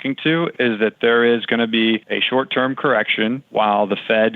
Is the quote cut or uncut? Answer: cut